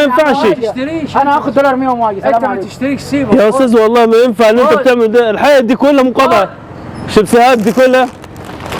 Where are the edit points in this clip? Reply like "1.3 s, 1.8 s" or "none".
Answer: none